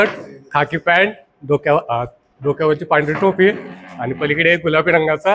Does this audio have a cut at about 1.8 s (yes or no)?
no